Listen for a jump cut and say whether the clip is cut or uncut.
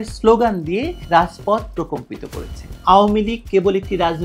cut